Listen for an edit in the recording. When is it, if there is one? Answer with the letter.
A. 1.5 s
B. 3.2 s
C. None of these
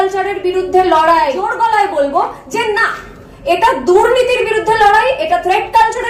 A